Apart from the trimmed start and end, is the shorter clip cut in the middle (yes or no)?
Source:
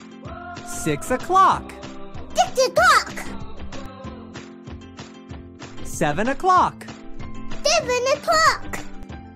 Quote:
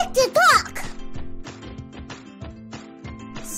no